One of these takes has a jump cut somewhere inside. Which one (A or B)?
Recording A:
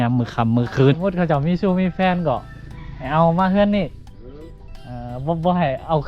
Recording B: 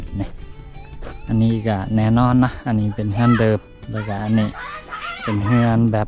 A